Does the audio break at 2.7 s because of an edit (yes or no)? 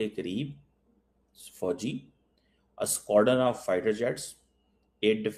no